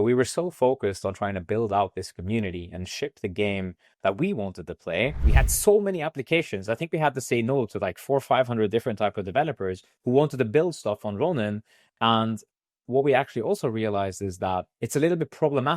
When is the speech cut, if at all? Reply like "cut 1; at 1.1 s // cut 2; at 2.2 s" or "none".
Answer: cut 1; at 5.2 s